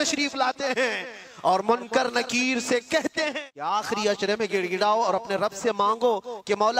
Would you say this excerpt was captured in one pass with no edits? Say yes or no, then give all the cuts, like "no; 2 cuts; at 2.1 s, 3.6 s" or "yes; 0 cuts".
no; 1 cut; at 3.5 s